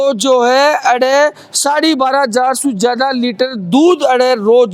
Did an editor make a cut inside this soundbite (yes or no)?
no